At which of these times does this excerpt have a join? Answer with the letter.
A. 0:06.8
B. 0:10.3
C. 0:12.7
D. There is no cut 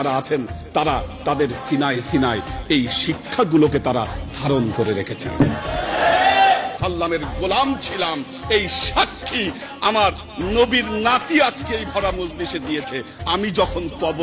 A